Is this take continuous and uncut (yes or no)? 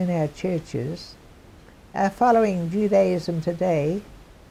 yes